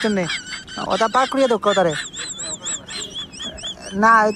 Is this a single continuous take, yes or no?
yes